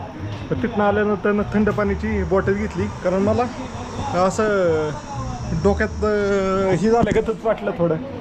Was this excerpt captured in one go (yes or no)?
yes